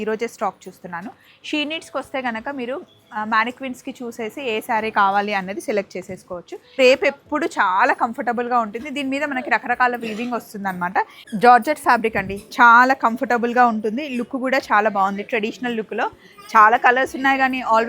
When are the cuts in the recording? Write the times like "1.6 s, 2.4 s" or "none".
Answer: 6.7 s, 11.2 s